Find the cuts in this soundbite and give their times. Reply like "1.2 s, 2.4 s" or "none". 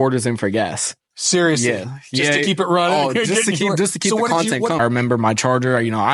4.8 s